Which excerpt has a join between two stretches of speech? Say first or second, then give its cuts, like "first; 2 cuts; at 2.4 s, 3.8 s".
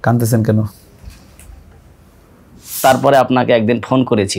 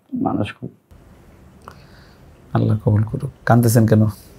first; 1 cut; at 2.7 s